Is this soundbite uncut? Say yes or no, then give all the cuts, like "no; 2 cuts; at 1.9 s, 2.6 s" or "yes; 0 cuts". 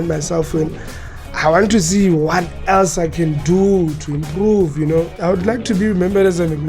no; 1 cut; at 5.1 s